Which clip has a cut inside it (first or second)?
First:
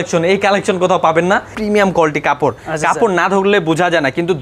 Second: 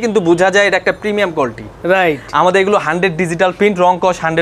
first